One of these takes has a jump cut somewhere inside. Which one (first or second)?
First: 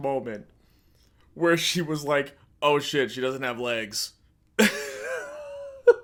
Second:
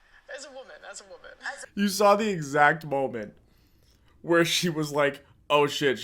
second